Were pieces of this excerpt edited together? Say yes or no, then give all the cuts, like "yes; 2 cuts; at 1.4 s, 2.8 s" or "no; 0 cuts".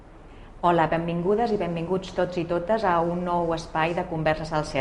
no; 0 cuts